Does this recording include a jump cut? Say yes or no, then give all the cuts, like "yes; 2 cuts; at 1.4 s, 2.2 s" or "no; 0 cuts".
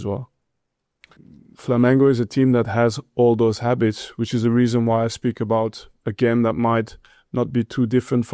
yes; 1 cut; at 1.1 s